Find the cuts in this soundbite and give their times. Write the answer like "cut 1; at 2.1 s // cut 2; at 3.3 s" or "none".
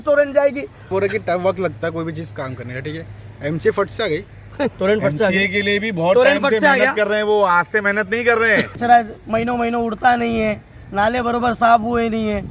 cut 1; at 0.9 s // cut 2; at 4.7 s // cut 3; at 8.8 s